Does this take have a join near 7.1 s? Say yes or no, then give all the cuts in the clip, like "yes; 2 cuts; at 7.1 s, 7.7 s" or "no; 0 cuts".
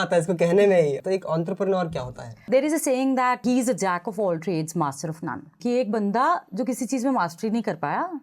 no; 4 cuts; at 1.0 s, 2.4 s, 3.4 s, 5.6 s